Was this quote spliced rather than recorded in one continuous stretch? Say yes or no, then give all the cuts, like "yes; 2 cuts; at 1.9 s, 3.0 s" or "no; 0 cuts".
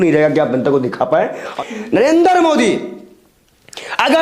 yes; 1 cut; at 1.4 s